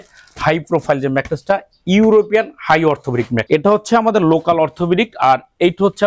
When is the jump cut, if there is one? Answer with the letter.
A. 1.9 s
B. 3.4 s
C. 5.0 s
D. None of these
B